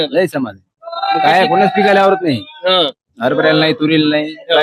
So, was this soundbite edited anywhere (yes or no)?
no